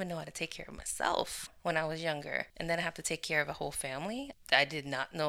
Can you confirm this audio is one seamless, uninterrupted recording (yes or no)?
no